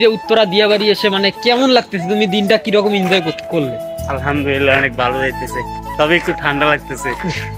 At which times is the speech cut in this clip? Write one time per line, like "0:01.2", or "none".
none